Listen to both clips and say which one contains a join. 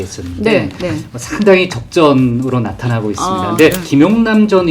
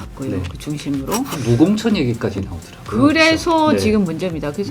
first; 1 cut; at 3.8 s

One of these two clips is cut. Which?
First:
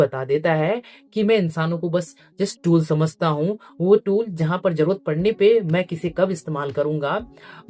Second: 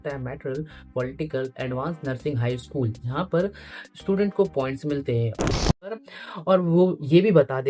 second; 1 cut; at 5.9 s

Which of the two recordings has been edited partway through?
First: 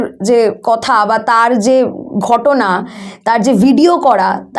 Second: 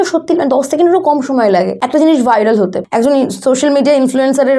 second; 2 cuts; at 1.8 s, 2.8 s

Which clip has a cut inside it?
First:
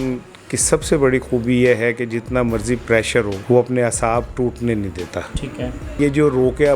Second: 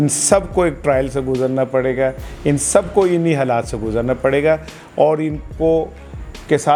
first; 2 cuts; at 3.4 s, 5.9 s

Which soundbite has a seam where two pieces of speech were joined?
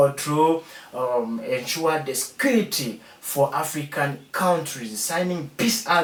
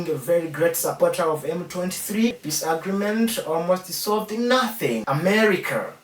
second; 2 cuts; at 2.4 s, 5.0 s

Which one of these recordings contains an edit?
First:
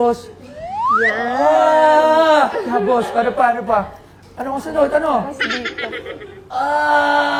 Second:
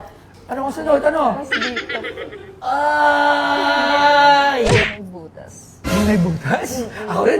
second; 1 cut; at 4.9 s

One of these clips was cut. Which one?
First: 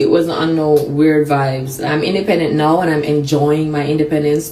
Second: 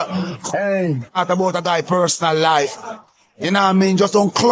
first; 1 cut; at 1.7 s

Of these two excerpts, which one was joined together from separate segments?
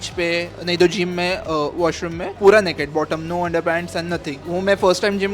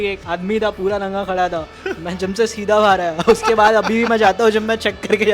first; 2 cuts; at 2.2 s, 4.4 s

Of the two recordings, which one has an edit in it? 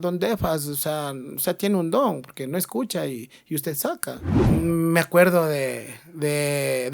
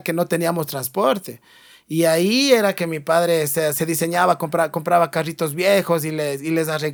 first; 1 cut; at 4.3 s

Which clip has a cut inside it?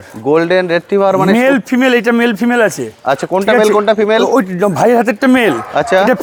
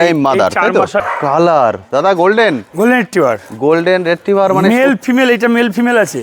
second; 1 cut; at 1.0 s

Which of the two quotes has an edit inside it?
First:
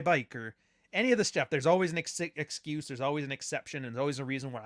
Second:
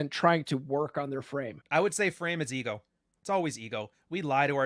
second; 1 cut; at 1.6 s

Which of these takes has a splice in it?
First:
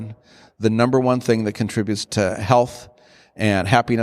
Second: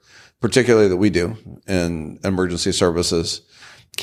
first; 1 cut; at 2.0 s

